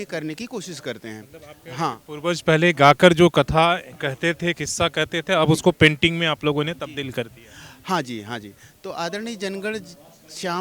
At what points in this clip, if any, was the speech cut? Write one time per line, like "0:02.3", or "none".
none